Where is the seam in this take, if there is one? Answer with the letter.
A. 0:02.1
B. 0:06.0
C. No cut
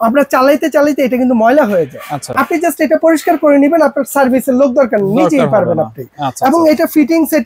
C